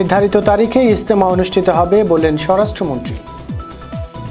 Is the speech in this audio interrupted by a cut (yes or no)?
yes